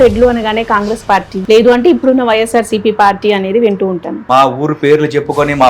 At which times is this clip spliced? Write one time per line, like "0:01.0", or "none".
0:01.3
0:04.1